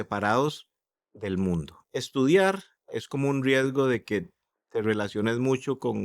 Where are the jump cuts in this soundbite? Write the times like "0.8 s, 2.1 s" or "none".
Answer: 1.8 s, 2.9 s